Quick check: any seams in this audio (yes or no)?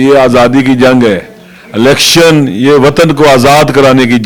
no